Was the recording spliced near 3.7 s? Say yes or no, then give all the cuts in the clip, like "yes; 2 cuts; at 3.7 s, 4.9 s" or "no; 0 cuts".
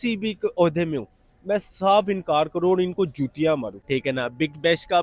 yes; 1 cut; at 3.7 s